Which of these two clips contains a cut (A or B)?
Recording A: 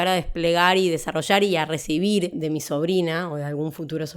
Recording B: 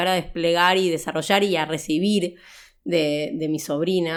A